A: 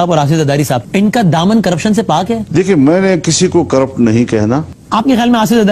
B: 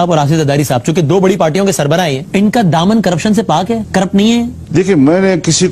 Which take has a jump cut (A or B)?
A